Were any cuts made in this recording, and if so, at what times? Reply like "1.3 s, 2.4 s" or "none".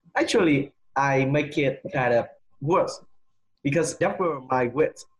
4.0 s